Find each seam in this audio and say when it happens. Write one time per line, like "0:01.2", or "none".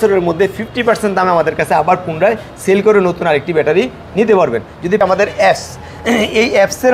0:05.0